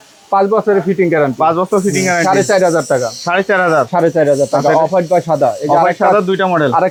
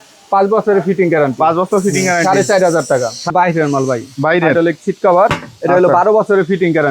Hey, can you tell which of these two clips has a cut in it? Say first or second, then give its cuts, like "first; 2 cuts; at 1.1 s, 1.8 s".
second; 1 cut; at 3.3 s